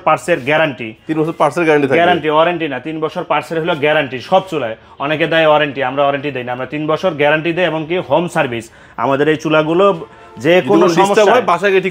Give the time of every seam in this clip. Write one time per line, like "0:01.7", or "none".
none